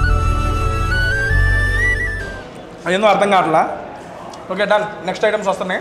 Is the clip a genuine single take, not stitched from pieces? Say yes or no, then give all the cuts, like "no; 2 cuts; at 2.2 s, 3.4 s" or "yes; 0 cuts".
yes; 0 cuts